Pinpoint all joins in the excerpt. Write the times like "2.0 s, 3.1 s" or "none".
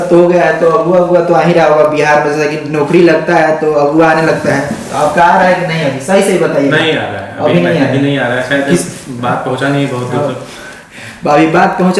none